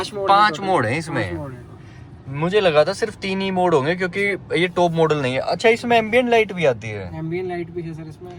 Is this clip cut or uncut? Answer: uncut